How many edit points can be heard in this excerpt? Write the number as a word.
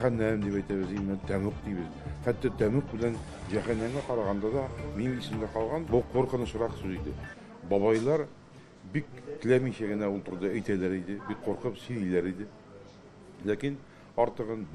one